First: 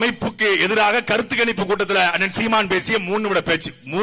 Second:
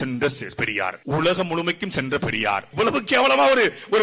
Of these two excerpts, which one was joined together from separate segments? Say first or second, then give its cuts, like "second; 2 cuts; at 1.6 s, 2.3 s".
second; 2 cuts; at 1.0 s, 2.7 s